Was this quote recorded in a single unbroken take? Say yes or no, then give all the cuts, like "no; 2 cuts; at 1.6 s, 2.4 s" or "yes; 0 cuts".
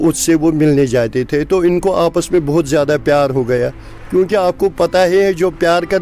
yes; 0 cuts